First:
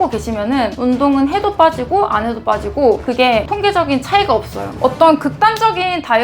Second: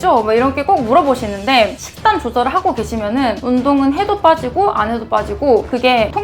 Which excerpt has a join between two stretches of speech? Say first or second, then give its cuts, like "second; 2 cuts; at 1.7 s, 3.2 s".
first; 1 cut; at 4.8 s